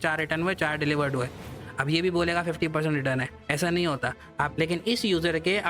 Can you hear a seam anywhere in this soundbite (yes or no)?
yes